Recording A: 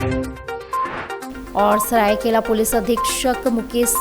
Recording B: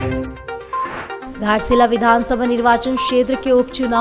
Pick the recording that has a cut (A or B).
B